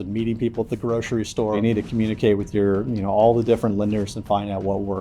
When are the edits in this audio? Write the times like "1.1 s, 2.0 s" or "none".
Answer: 1.6 s